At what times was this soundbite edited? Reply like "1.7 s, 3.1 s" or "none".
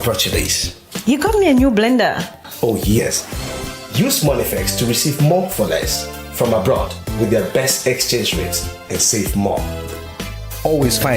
3.0 s